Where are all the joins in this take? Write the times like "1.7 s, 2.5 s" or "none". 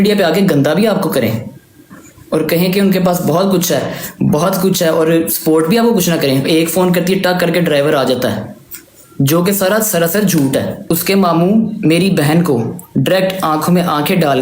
10.8 s

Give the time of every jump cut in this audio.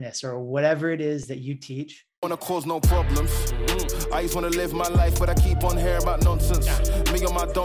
2.3 s

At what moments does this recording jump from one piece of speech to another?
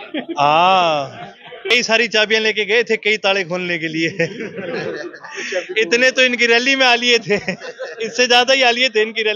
1.7 s

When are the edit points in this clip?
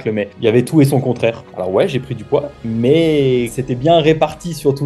1.5 s, 3.5 s

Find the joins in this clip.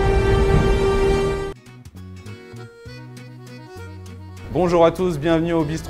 1.5 s

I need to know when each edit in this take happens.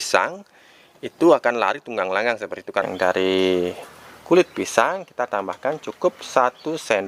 2.8 s

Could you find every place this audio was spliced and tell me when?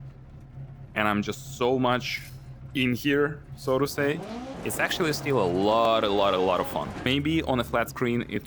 4.6 s, 7.1 s

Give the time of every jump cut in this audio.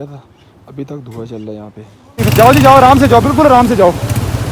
2.1 s

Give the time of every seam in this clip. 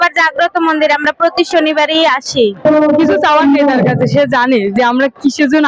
2.6 s

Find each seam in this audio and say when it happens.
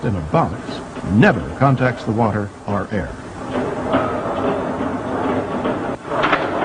none

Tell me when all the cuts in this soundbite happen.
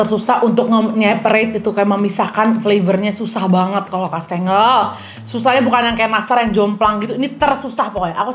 none

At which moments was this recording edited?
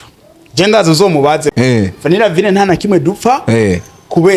1.5 s

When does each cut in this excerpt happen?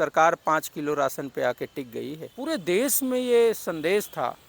2.3 s

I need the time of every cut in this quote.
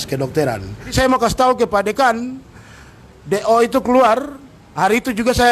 0.9 s

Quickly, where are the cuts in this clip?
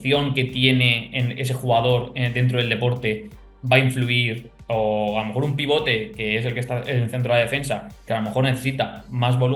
none

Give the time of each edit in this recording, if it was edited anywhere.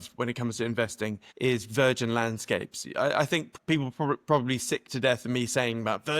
1.2 s, 3.5 s

